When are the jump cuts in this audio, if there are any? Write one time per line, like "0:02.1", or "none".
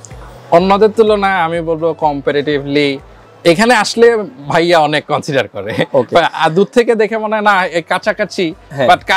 none